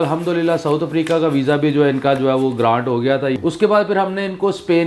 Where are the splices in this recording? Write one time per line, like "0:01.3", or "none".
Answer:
0:03.4

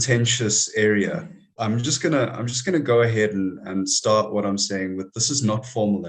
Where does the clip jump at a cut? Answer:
0:01.5

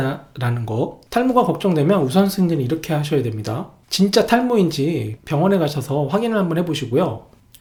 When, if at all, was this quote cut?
none

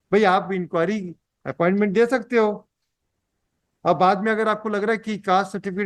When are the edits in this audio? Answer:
none

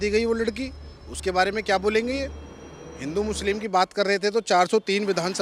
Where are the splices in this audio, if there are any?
none

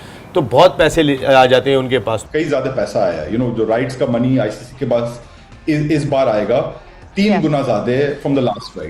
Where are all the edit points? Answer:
0:02.2

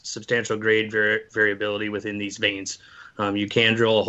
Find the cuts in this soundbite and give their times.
none

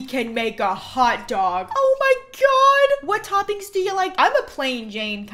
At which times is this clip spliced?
0:01.7
0:04.1

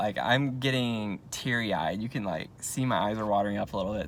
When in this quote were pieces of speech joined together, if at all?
none

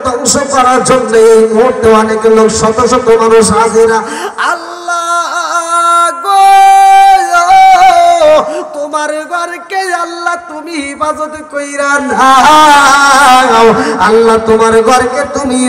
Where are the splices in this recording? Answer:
none

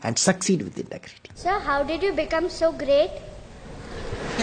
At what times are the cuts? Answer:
0:01.4

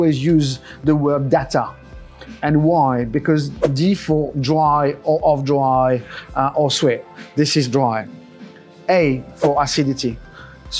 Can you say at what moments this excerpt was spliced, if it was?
none

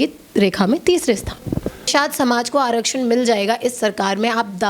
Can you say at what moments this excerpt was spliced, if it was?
0:01.9

